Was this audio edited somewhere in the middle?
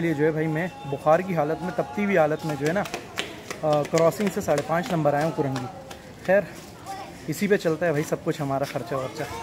no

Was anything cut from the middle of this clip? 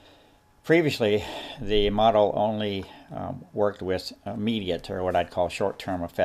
yes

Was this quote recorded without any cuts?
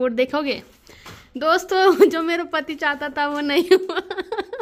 yes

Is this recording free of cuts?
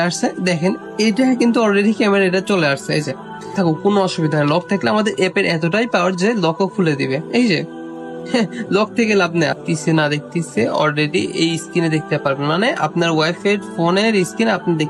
no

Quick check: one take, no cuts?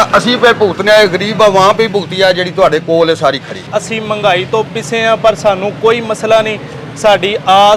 no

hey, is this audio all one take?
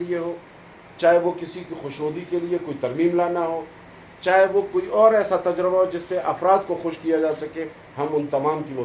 yes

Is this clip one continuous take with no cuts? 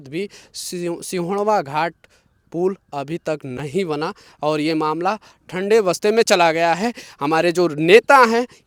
yes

